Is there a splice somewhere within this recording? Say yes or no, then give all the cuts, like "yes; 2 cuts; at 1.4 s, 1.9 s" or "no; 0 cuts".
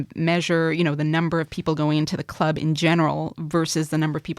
no; 0 cuts